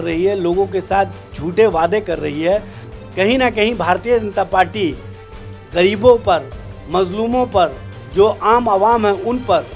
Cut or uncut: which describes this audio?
cut